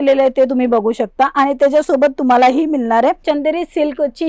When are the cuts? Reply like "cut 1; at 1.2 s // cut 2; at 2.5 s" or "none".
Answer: cut 1; at 3.2 s